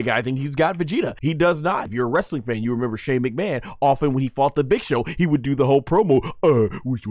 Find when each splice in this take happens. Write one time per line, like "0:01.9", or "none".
0:01.1
0:01.9